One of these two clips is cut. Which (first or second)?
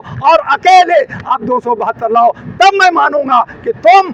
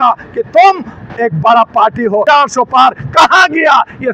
second